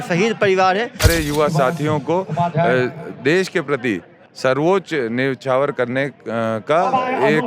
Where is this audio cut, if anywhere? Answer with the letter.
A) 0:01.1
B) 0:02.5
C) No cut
A